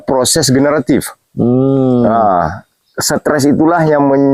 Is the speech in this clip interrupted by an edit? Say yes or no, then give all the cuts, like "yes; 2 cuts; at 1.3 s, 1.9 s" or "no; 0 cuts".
no; 0 cuts